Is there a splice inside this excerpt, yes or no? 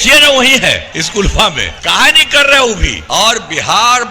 yes